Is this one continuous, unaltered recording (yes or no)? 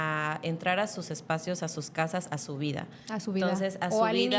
yes